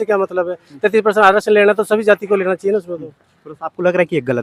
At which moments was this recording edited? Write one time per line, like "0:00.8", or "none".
none

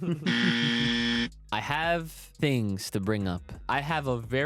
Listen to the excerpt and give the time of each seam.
0:01.4
0:02.2
0:03.6

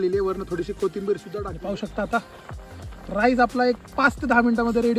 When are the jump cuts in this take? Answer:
0:01.5

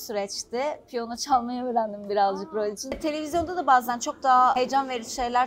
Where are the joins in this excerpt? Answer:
0:03.0
0:04.5

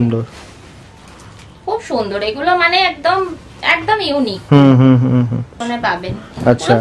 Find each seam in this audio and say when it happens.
0:05.6

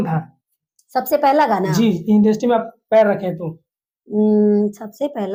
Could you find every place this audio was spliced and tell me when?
none

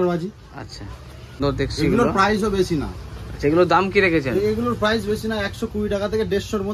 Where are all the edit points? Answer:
0:01.4

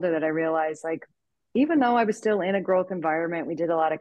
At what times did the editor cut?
none

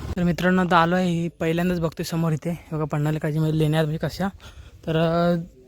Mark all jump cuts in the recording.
none

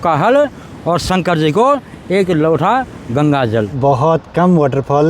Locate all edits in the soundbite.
0:03.8

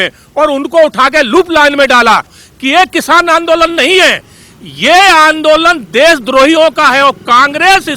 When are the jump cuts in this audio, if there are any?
0:02.4

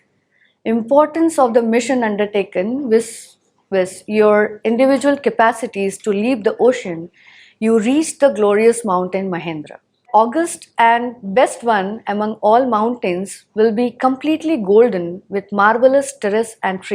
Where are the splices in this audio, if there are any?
0:10.0

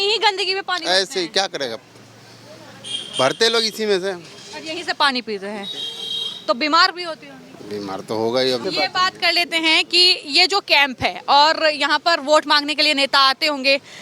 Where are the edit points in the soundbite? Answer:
none

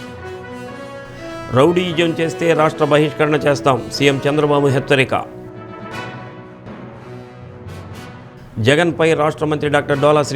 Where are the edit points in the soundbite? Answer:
0:00.9

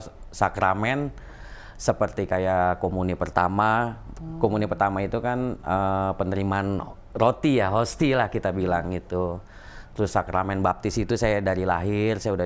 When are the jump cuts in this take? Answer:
none

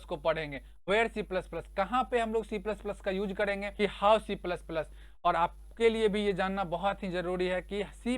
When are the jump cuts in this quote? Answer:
0:03.7

